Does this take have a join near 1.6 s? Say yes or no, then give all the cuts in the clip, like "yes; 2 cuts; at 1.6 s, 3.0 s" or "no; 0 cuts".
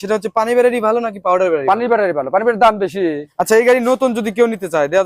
no; 1 cut; at 3.3 s